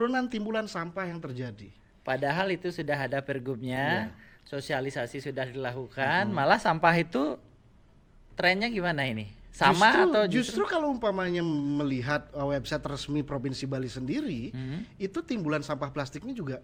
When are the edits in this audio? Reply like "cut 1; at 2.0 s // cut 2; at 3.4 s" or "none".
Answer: none